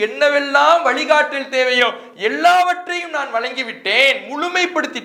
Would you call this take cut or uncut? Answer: uncut